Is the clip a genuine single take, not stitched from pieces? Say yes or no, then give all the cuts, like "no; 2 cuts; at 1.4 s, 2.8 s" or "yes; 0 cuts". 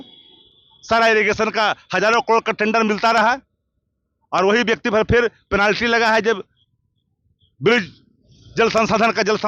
yes; 0 cuts